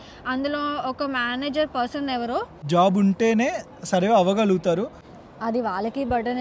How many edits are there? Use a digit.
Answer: 2